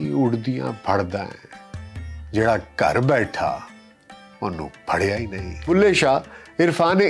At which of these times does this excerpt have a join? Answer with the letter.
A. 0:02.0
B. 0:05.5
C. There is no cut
B